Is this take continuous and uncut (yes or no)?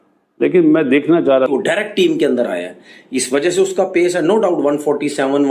no